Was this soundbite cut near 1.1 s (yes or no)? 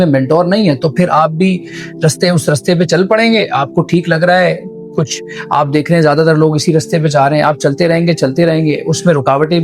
no